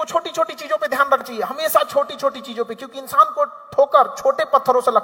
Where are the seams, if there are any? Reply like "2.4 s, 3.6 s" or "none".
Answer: 1.3 s